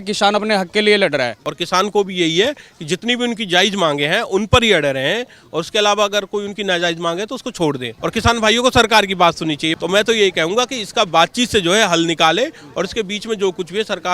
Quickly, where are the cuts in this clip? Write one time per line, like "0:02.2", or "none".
0:01.5
0:07.9
0:09.7